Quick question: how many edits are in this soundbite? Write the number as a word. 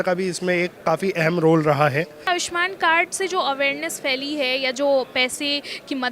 one